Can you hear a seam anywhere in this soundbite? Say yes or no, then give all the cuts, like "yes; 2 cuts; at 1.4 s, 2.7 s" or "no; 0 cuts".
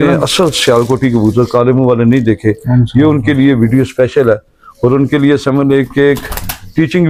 no; 0 cuts